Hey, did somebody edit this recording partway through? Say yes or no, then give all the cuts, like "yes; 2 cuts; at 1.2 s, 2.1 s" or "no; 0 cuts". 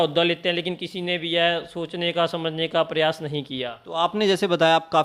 no; 0 cuts